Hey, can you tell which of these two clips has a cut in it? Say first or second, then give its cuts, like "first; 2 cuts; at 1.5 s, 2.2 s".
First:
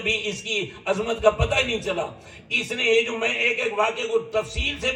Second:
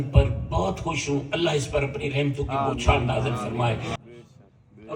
second; 1 cut; at 4.0 s